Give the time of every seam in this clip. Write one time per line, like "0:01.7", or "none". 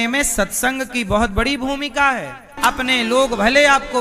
0:02.5